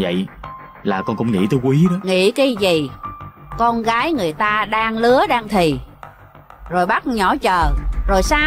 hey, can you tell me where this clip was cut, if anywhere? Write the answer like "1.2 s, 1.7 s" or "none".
2.0 s